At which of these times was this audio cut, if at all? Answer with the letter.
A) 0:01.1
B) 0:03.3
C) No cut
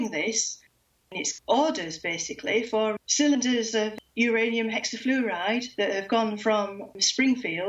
A